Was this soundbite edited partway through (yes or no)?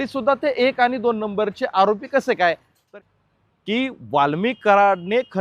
yes